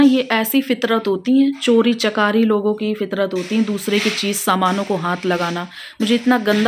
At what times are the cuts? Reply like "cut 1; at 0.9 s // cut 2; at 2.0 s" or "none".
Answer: none